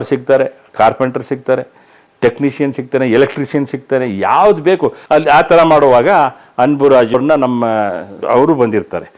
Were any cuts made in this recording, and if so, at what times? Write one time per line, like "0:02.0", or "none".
0:05.0
0:08.1

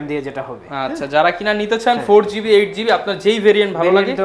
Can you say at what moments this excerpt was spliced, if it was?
none

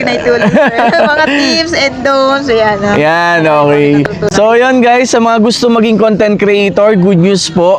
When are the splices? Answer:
none

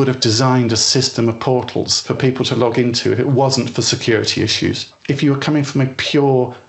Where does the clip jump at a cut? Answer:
0:02.0

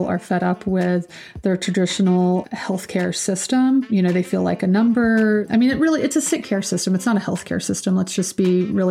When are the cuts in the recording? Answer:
0:02.4
0:03.9
0:05.5

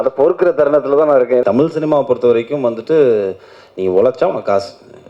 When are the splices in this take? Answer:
0:01.4

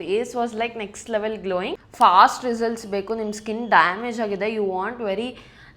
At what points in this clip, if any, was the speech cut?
0:01.8

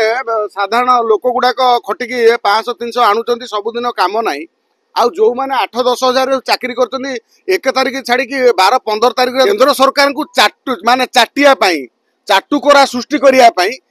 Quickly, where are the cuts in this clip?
0:09.5

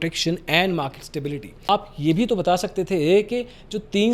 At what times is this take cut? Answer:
0:01.6

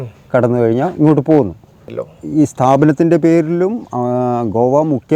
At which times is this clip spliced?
0:02.0

